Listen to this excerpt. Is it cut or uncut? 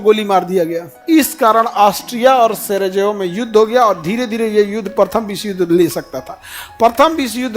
cut